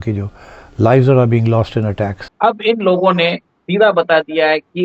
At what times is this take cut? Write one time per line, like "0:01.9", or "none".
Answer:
0:02.2

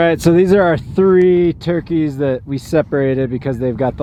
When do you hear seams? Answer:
none

